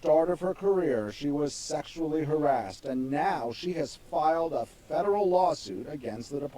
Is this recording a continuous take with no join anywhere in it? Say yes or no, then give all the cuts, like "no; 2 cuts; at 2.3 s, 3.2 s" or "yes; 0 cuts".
no; 1 cut; at 1.1 s